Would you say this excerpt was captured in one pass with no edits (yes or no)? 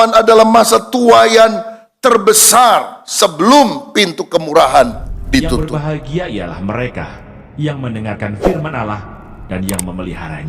no